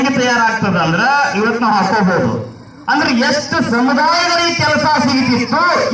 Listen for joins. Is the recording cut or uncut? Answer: uncut